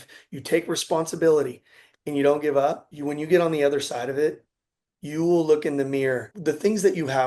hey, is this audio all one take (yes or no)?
no